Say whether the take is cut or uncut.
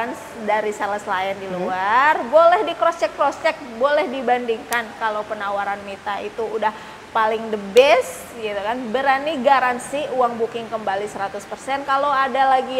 uncut